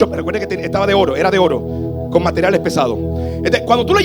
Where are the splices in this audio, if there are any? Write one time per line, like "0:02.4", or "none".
none